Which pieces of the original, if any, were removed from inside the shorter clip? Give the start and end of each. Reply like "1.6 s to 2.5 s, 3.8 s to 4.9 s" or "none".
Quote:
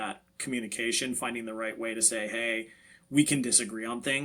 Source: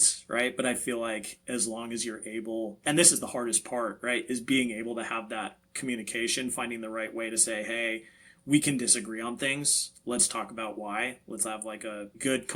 none